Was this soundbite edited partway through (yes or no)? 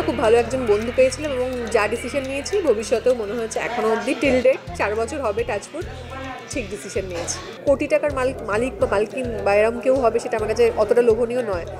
yes